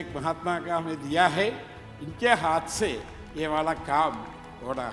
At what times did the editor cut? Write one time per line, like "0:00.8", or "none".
none